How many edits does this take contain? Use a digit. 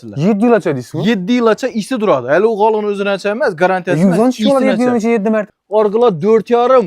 1